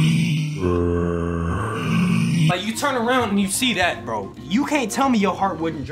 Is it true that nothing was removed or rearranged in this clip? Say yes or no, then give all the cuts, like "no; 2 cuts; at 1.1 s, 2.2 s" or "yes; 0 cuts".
yes; 0 cuts